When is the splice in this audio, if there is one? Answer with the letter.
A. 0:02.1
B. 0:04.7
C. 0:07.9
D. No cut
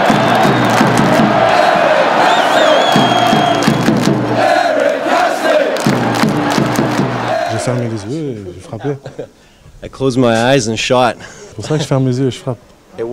C